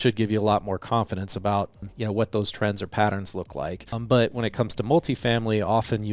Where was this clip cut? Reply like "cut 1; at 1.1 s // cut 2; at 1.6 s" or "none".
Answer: cut 1; at 1.8 s // cut 2; at 4.0 s